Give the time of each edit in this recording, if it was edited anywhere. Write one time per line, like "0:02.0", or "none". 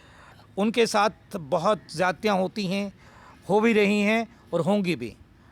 none